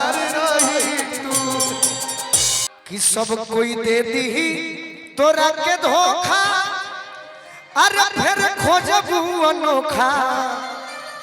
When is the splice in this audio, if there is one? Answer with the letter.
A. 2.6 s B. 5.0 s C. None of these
A